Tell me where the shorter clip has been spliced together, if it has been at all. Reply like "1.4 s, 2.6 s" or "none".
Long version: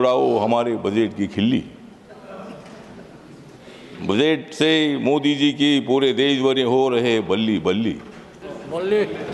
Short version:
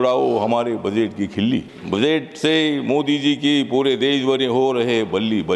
1.7 s